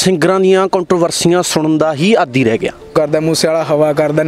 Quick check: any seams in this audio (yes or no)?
yes